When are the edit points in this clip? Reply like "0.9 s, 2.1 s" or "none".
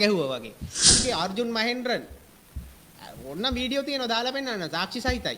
0.9 s